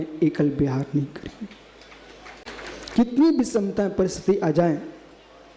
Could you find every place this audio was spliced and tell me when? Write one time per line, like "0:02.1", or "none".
0:02.4

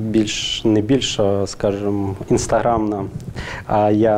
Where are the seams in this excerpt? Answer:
none

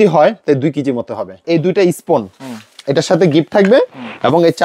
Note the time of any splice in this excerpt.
0:01.3

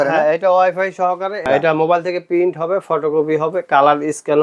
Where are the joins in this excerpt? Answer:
0:01.5

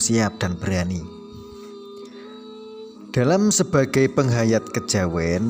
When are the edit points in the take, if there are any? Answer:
0:01.6
0:03.1

